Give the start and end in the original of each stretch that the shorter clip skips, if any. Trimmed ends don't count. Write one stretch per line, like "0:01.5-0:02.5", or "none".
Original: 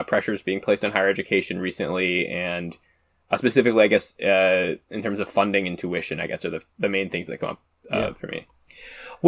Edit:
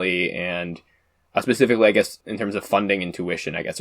0:04.1-0:04.8